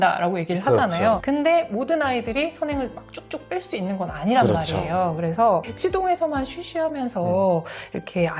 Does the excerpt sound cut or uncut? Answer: cut